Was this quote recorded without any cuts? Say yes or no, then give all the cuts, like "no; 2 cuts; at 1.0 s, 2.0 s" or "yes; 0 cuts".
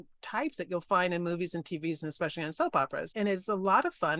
no; 1 cut; at 3.1 s